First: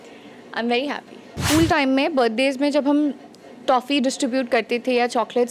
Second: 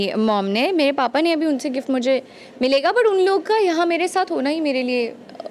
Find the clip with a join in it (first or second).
first